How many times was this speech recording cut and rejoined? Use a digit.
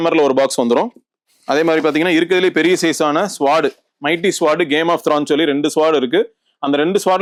0